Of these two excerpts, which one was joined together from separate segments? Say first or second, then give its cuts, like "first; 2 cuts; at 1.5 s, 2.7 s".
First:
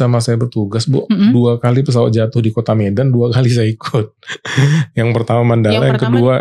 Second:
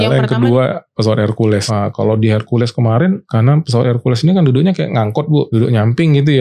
second; 3 cuts; at 1.7 s, 3.3 s, 5.5 s